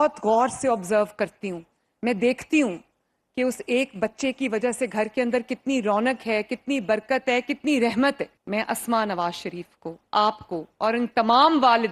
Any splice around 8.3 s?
yes; 1 cut; at 8.3 s

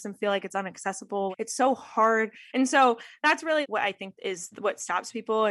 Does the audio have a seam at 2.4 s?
yes; 1 cut; at 2.4 s

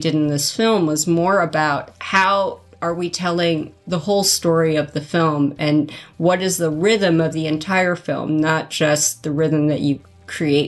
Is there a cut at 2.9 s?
no; 0 cuts

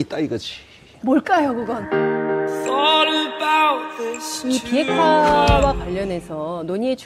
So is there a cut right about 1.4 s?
yes; 1 cut; at 1.4 s

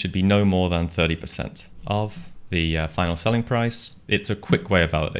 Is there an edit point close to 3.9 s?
yes; 3 cuts; at 1.7 s, 2.3 s, 3.9 s

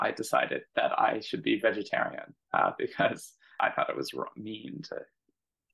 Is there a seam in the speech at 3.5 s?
yes; 1 cut; at 3.5 s

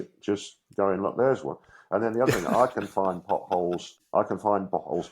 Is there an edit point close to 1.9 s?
no; 1 cut; at 3.9 s

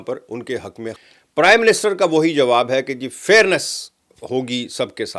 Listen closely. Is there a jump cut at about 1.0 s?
yes; 1 cut; at 1.0 s

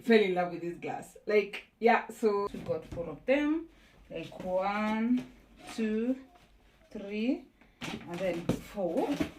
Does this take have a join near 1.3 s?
no; 1 cut; at 2.6 s

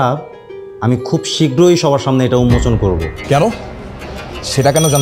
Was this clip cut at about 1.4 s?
no; 1 cut; at 3.2 s

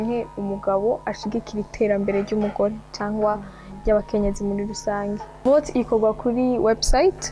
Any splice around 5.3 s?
yes; 1 cut; at 5.3 s

